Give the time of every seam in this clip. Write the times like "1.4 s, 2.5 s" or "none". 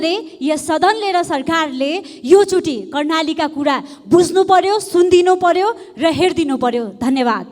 none